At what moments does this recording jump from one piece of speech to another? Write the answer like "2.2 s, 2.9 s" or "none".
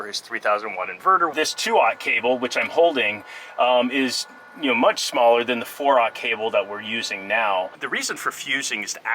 1.3 s, 7.8 s